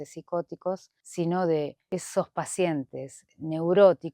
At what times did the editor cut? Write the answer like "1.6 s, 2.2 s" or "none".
1.0 s, 1.8 s

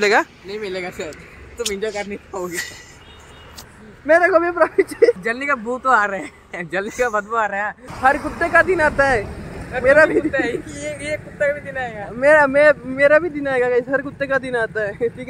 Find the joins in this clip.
5.2 s, 7.8 s

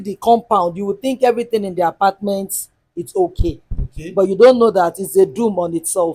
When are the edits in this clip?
none

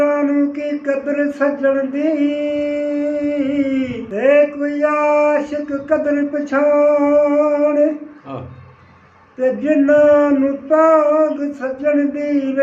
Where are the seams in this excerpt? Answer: 4.0 s

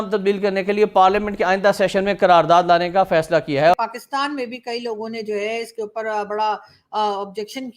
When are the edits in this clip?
3.7 s

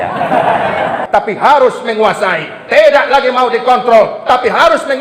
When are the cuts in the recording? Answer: 1.0 s

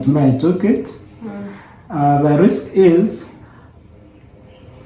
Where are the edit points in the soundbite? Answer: none

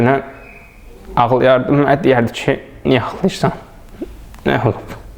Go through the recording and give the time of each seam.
none

